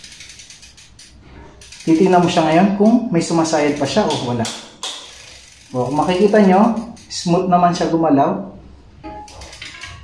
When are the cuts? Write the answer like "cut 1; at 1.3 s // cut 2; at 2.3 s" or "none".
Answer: none

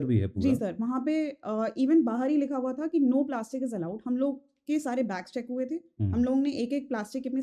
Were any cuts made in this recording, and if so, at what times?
none

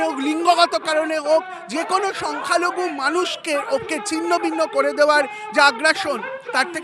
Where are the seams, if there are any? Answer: none

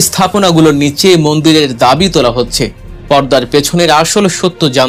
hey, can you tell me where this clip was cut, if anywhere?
none

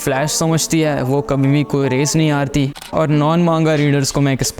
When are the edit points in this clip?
cut 1; at 2.8 s

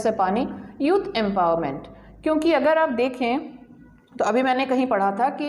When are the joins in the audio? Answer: none

